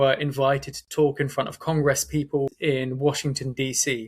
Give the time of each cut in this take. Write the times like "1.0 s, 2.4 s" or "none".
2.5 s